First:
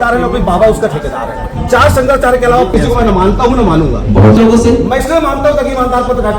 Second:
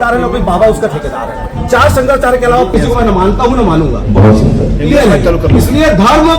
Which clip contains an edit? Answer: first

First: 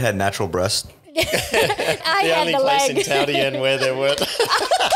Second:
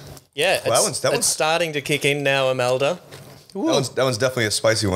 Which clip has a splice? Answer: first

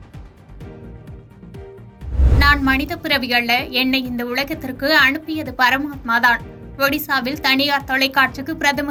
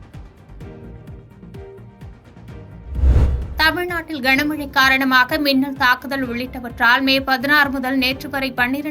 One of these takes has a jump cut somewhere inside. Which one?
second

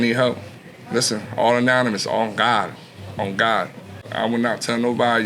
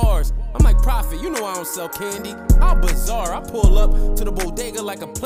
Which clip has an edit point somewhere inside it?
first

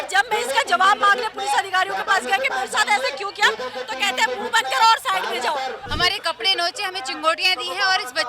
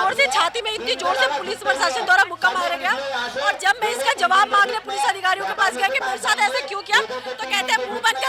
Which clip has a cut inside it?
first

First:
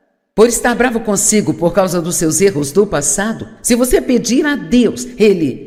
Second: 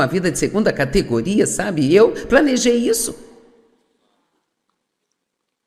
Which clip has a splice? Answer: second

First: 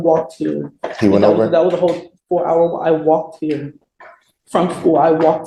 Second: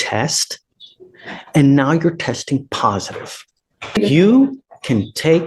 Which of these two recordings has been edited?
second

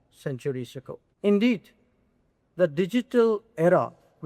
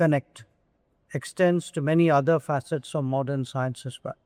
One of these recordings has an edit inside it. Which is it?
first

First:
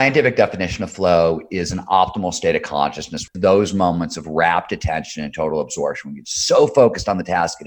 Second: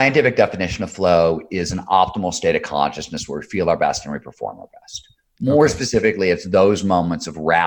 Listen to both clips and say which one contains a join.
first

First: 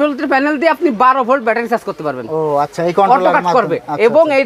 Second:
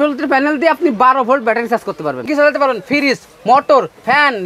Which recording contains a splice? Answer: second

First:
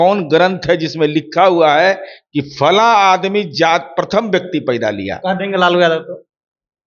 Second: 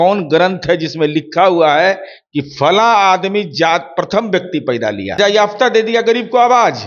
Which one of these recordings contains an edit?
second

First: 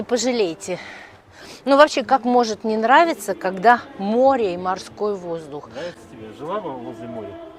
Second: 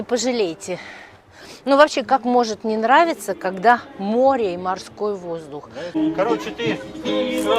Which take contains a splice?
second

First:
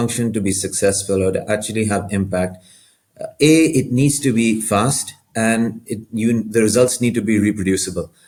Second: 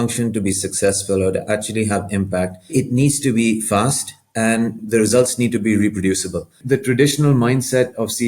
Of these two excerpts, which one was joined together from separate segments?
second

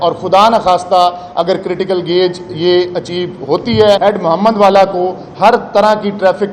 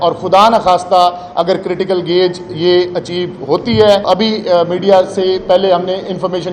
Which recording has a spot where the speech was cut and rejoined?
first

